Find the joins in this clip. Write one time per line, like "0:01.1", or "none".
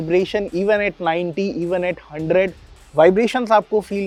none